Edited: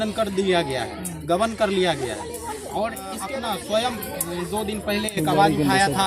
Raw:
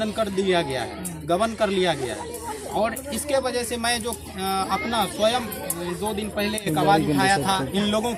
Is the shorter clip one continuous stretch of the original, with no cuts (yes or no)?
no